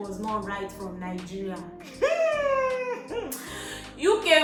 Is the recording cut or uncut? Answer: uncut